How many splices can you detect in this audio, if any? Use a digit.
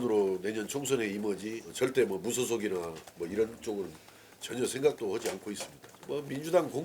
2